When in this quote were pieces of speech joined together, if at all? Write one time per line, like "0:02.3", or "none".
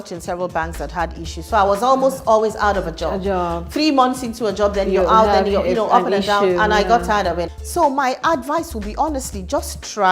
0:07.5